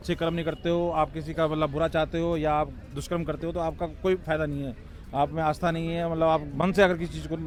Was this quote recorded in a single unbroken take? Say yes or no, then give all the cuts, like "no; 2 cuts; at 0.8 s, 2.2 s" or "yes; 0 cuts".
yes; 0 cuts